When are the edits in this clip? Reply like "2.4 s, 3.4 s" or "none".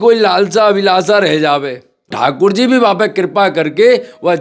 2.1 s